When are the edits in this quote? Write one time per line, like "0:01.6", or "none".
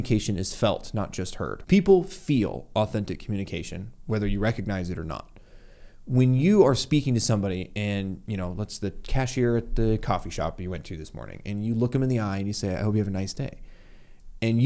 0:01.6